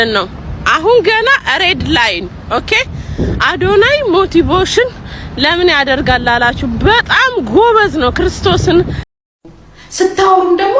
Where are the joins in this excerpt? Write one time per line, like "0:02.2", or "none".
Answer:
0:09.0

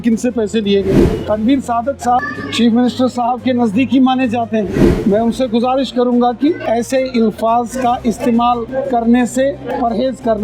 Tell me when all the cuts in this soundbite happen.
0:01.0
0:02.2
0:04.9
0:06.6
0:08.7
0:09.7

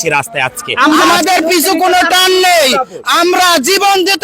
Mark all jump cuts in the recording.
0:01.0

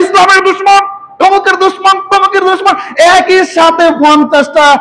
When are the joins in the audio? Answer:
none

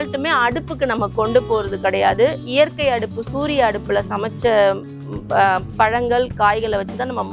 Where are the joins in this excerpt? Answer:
none

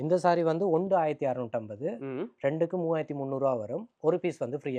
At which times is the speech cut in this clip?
none

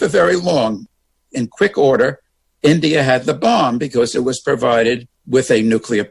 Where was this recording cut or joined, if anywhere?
0:05.1

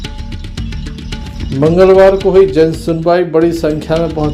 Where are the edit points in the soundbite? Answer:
0:01.2

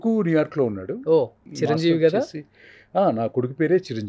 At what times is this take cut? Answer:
0:01.4

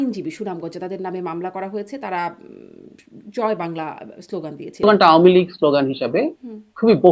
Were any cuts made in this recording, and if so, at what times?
0:04.8

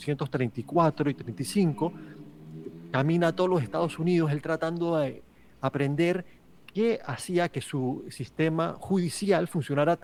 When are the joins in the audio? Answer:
none

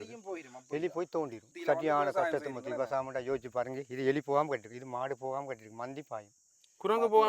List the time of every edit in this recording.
0:01.5

